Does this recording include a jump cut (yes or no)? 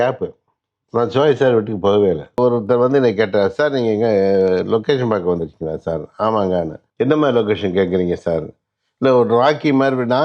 yes